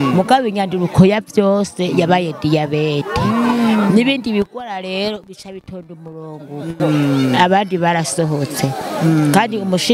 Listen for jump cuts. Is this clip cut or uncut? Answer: cut